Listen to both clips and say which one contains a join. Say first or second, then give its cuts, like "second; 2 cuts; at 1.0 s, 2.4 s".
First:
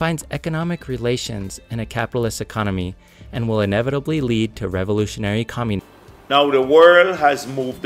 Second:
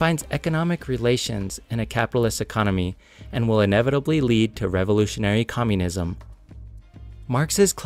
first; 1 cut; at 5.8 s